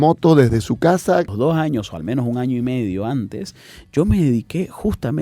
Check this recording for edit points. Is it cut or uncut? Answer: cut